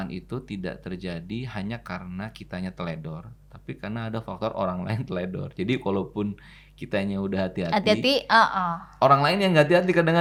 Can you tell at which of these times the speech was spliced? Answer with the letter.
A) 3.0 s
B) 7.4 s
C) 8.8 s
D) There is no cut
D